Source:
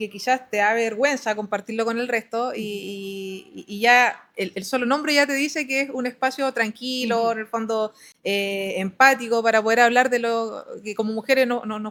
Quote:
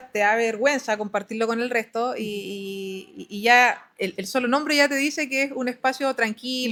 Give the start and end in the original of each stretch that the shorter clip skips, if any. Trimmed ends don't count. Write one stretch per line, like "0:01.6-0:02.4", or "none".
none